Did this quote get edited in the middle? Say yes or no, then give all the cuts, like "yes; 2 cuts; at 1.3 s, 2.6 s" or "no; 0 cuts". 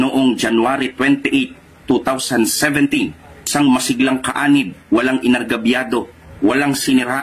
no; 0 cuts